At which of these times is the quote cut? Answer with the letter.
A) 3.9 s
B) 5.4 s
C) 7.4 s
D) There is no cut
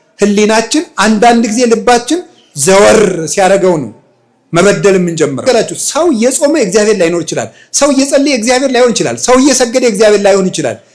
B